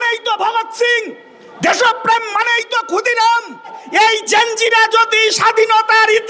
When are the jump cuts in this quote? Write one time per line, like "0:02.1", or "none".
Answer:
0:03.8